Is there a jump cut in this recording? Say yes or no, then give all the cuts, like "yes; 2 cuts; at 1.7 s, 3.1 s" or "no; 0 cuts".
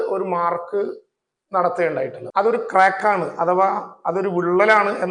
yes; 1 cut; at 2.2 s